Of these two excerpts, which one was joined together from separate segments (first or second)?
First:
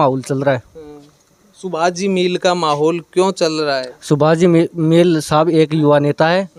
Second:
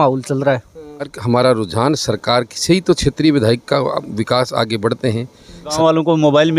second